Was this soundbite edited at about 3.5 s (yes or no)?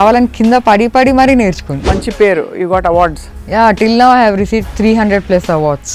no